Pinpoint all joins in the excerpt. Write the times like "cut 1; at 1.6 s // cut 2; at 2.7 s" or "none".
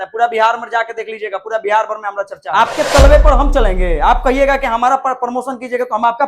cut 1; at 2.4 s